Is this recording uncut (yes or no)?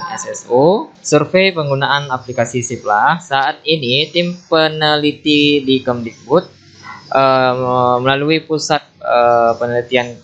no